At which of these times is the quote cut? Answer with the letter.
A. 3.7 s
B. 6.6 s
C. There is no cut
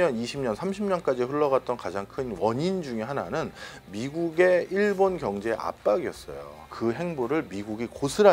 B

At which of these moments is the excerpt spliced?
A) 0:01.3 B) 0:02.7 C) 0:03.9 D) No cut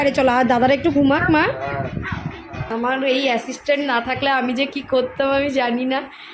B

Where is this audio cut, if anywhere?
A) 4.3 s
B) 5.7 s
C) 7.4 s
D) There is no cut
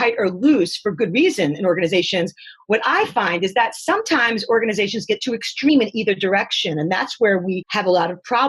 B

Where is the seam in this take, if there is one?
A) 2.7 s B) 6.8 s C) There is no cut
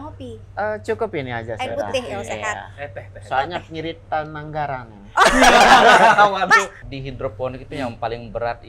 B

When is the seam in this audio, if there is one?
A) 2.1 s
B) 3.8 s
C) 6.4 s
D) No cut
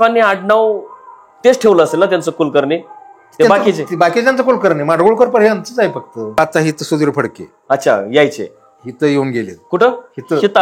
C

